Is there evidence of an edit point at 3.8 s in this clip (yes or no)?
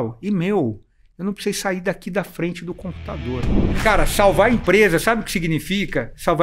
yes